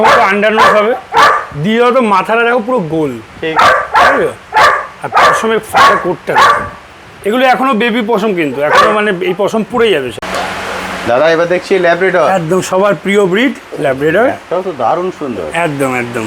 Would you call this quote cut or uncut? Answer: cut